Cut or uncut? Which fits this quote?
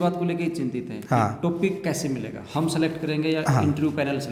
uncut